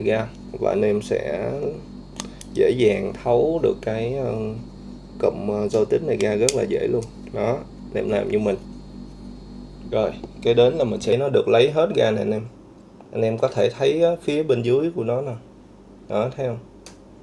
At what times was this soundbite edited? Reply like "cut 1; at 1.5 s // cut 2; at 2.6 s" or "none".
cut 1; at 11.1 s